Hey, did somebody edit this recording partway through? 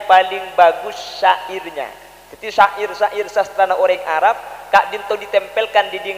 no; 0 cuts

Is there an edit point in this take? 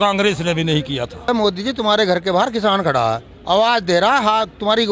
yes; 2 cuts; at 1.3 s, 3.3 s

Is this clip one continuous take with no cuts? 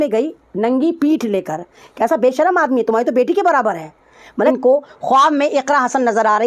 no; 1 cut; at 4.5 s

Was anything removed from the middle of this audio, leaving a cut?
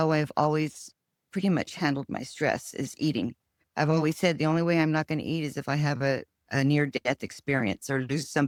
no; 0 cuts

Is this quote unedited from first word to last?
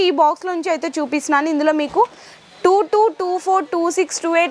yes; 0 cuts

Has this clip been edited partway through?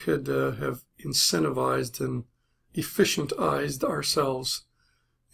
yes; 1 cut; at 1.7 s

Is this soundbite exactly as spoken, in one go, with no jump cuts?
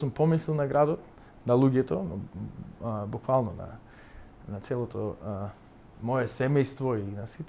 yes; 0 cuts

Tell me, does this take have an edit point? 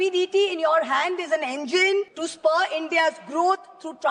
yes; 1 cut; at 2.2 s

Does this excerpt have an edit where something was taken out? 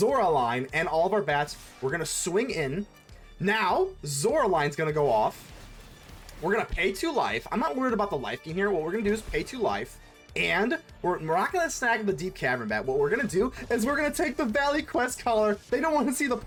no; 0 cuts

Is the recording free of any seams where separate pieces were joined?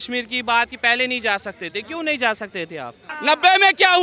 no; 1 cut; at 3.1 s

